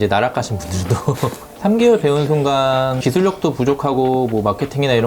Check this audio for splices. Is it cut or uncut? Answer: cut